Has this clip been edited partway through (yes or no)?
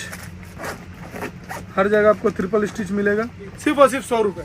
yes